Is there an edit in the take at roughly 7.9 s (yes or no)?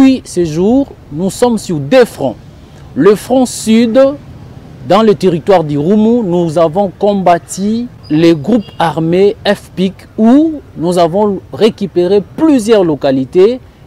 yes